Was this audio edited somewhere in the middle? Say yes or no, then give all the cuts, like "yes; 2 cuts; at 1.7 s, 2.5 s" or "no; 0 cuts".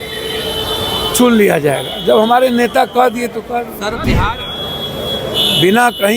yes; 1 cut; at 4.3 s